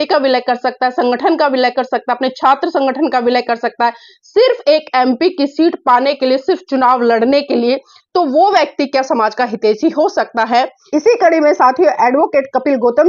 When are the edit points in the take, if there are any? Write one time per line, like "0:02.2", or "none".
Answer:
0:10.9